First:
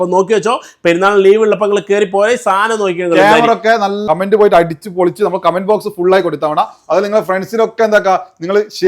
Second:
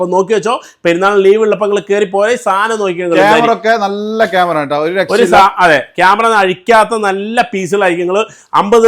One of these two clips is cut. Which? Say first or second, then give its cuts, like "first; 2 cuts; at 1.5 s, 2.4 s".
first; 1 cut; at 4.0 s